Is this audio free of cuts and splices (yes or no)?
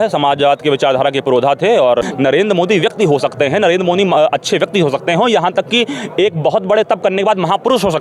no